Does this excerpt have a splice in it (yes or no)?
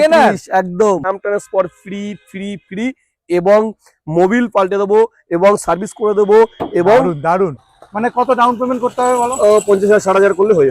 yes